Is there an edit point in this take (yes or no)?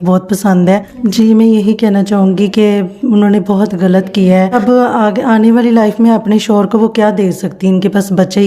yes